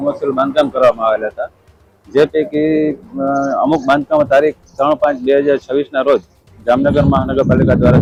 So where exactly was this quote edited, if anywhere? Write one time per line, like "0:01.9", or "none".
none

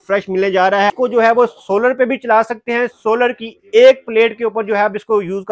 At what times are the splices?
0:00.9

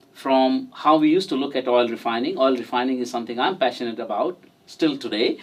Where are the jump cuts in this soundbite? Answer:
none

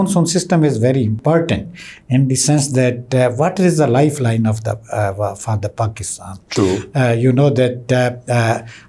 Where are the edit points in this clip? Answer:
0:01.2

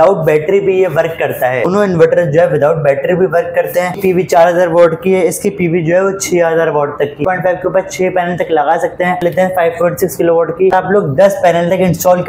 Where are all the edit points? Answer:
0:01.7
0:04.0
0:07.2
0:09.2
0:10.7

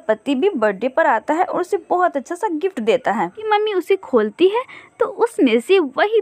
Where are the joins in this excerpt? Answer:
0:03.5

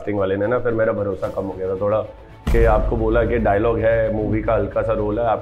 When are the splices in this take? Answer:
none

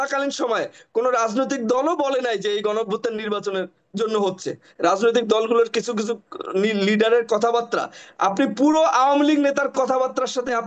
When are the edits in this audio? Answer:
0:04.6

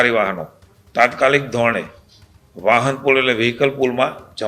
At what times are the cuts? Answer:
none

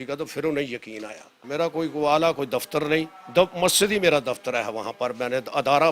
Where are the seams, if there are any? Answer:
0:01.4

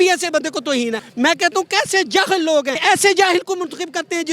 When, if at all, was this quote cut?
0:01.0
0:02.7

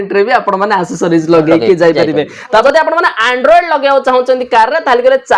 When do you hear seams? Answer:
0:02.6

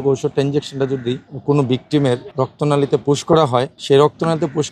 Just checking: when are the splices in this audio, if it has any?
0:01.3
0:02.3
0:03.7

